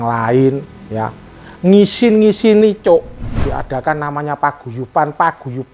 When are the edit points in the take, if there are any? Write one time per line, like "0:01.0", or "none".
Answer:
0:03.2